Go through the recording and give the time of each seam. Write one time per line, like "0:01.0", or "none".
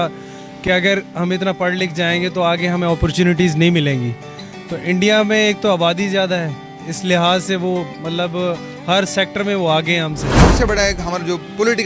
0:10.5